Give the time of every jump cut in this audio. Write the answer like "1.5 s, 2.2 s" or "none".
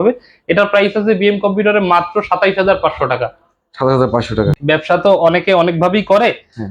4.5 s